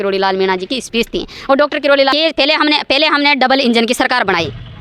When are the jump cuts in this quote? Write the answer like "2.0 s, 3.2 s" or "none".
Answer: 2.1 s